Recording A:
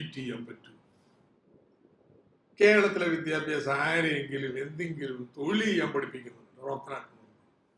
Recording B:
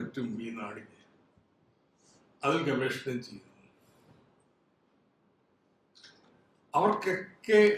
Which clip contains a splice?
A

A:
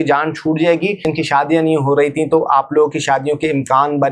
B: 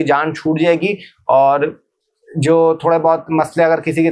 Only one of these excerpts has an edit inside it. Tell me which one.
A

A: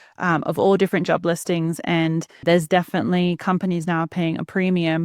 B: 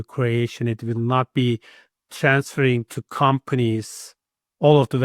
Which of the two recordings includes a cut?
A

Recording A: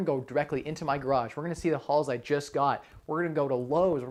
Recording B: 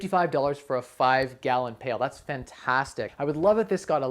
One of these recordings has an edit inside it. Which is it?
B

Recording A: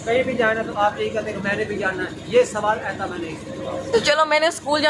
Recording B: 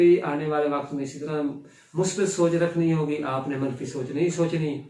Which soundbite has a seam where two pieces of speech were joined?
A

